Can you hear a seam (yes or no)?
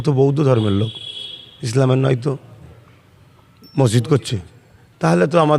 no